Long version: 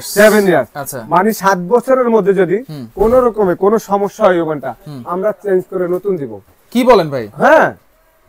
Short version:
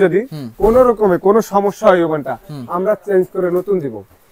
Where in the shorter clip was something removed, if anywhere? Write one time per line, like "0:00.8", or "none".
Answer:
none

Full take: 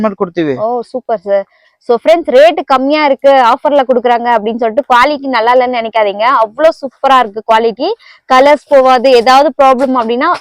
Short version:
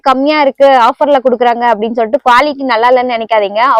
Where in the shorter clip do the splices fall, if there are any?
none

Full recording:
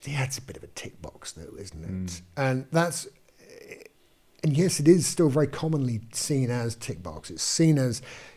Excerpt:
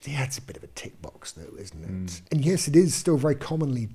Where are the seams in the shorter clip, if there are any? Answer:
0:02.2

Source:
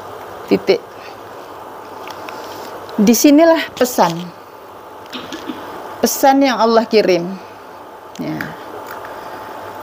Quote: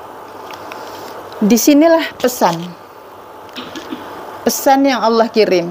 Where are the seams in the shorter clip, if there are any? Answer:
none

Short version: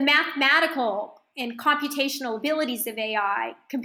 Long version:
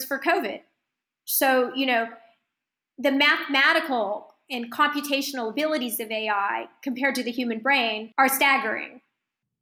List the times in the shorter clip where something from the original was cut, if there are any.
none

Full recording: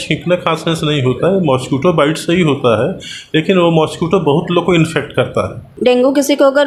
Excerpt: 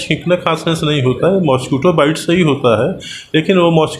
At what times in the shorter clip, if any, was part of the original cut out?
none

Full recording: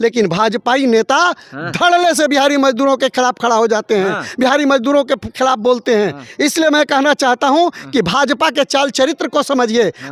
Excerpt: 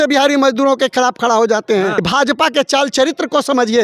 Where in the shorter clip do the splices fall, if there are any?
0:02.0

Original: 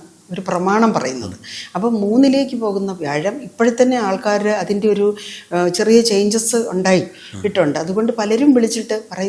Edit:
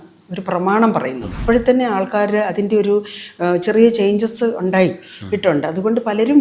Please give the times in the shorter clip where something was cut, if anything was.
0:01.3

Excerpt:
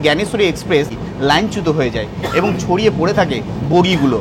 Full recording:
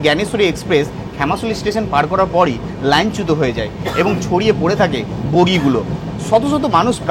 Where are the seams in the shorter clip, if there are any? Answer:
0:01.0

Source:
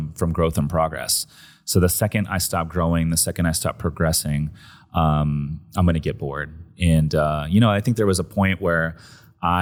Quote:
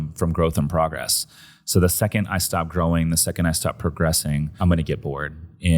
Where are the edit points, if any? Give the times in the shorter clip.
0:04.5

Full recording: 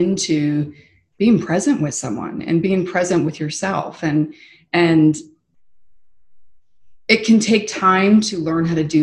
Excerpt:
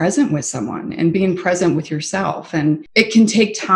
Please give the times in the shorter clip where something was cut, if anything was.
0:02.9

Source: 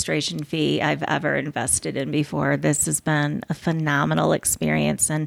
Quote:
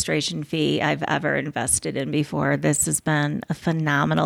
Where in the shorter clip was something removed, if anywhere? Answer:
none

